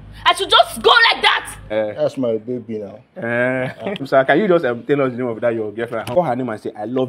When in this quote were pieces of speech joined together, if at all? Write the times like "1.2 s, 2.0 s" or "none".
1.6 s, 4.1 s, 6.1 s